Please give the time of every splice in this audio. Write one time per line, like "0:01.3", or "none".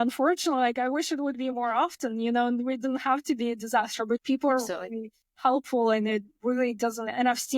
none